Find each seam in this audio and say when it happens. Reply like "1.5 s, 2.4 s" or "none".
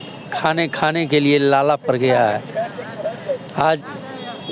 none

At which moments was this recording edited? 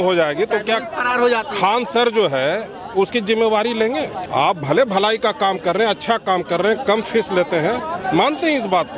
4.2 s

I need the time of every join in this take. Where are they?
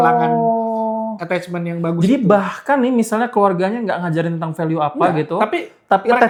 none

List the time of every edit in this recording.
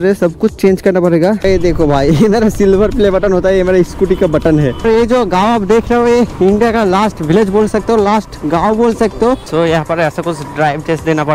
1.4 s, 4.8 s, 9.5 s

